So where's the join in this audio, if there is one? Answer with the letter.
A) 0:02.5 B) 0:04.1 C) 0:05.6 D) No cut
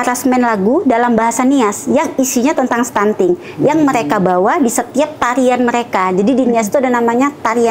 D